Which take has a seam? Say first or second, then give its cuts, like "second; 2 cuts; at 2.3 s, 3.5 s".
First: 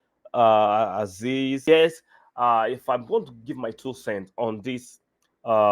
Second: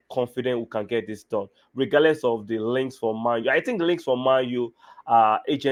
first; 1 cut; at 1.6 s